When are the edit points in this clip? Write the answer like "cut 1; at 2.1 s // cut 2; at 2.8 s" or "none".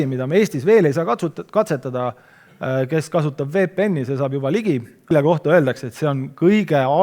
cut 1; at 5.1 s